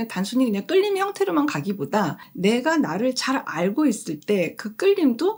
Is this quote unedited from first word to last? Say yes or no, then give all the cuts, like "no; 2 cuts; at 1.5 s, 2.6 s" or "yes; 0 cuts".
yes; 0 cuts